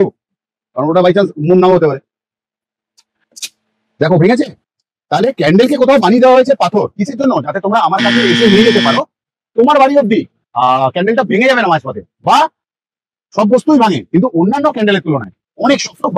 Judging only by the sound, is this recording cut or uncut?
uncut